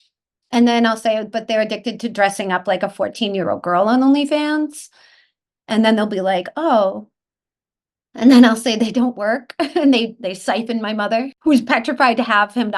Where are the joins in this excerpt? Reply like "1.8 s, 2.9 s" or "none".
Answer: 11.3 s